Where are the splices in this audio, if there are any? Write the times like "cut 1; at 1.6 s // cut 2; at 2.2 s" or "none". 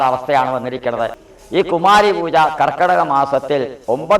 cut 1; at 1.1 s